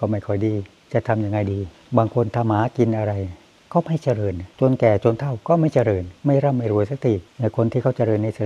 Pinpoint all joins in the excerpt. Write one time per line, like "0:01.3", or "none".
0:01.7